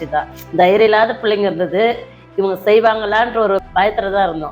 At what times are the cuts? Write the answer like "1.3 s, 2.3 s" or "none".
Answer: 3.6 s